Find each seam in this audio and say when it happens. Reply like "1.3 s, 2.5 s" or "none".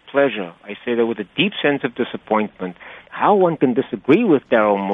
2.9 s